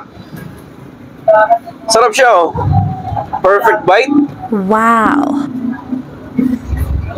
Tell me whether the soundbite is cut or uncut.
uncut